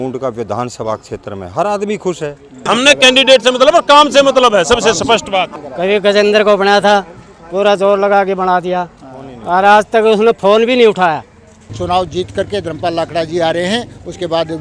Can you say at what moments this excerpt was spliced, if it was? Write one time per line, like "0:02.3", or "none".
0:02.6
0:05.6
0:11.7